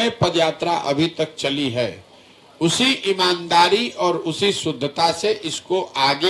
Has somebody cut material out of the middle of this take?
no; 0 cuts

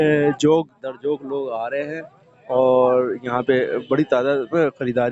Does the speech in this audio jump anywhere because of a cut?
no; 0 cuts

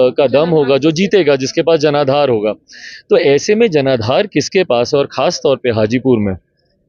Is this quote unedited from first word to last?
yes; 0 cuts

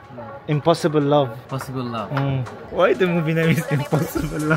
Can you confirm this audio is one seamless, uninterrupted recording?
yes; 0 cuts

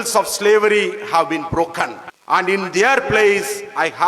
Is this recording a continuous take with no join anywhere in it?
no; 1 cut; at 2.1 s

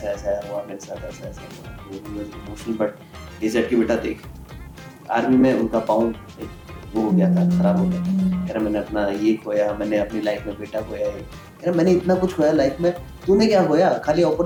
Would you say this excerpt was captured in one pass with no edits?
yes; 0 cuts

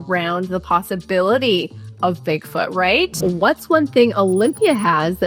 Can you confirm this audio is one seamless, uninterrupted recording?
no; 1 cut; at 3.2 s

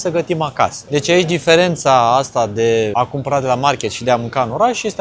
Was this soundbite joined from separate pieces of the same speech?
yes; 2 cuts; at 0.8 s, 2.9 s

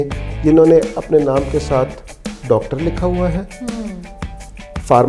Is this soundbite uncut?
yes; 0 cuts

